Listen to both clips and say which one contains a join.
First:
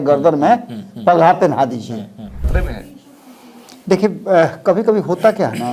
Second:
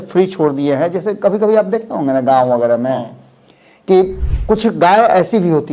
first; 1 cut; at 2.5 s

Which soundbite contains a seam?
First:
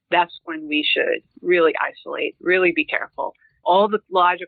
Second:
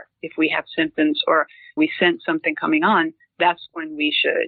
second; 1 cut; at 1.8 s

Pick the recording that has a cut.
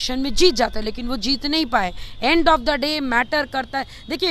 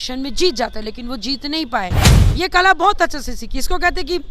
second; 1 cut; at 2.0 s

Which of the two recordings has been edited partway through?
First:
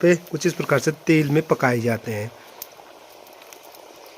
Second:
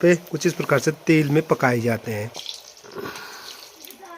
second; 1 cut; at 2.3 s

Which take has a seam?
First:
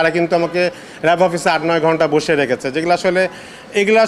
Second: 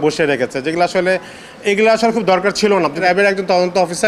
second; 1 cut; at 3.0 s

